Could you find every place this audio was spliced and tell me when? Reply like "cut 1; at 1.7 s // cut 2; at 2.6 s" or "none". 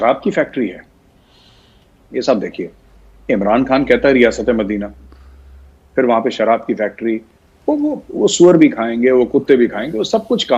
none